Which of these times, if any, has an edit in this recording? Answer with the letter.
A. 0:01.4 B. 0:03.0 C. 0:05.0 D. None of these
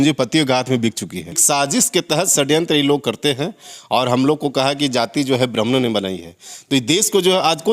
A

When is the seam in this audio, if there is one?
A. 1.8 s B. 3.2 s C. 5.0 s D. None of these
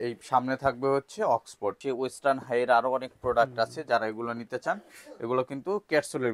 A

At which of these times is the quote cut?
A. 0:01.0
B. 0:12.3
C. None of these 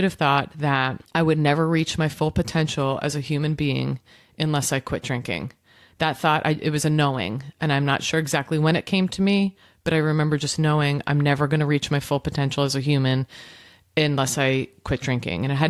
A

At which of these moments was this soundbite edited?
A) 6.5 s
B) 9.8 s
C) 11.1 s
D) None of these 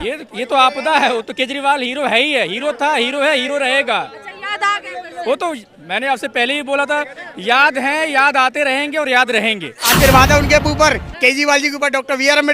B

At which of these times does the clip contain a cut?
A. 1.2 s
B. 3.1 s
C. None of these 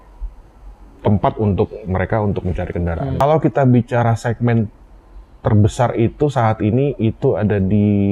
B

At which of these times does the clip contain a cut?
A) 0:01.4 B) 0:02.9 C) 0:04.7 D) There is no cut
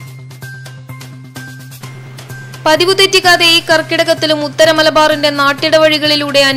A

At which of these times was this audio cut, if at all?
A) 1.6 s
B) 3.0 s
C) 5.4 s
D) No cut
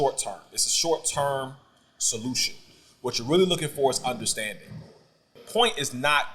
C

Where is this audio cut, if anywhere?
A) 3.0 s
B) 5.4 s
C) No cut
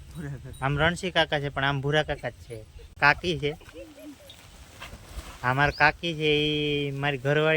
A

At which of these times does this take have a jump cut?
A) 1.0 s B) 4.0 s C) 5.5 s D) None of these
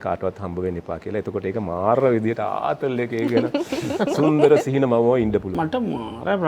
C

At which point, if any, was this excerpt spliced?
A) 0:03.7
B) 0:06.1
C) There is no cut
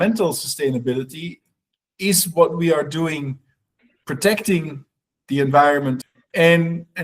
B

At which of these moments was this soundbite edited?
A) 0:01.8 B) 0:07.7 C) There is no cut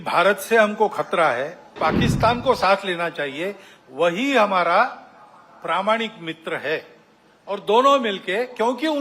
A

